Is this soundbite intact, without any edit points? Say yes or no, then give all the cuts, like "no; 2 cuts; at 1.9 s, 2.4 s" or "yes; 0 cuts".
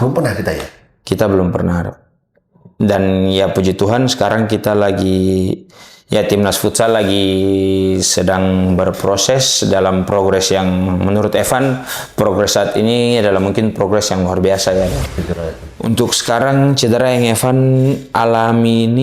no; 1 cut; at 15.1 s